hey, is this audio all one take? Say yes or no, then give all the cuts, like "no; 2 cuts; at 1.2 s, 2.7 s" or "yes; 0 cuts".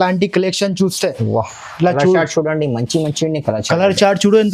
yes; 0 cuts